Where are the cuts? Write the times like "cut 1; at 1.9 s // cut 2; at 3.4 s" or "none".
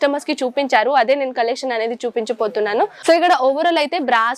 cut 1; at 3.0 s